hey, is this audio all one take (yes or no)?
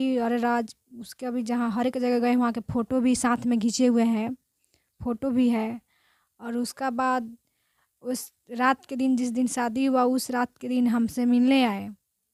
yes